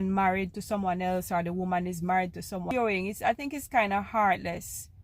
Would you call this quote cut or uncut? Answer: cut